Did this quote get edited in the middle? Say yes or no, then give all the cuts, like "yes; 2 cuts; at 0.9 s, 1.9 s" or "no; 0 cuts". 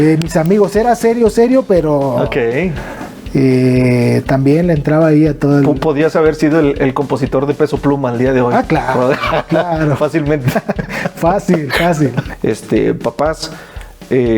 yes; 1 cut; at 12.3 s